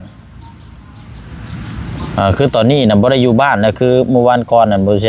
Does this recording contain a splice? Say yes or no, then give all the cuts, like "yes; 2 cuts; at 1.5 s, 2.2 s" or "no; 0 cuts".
no; 0 cuts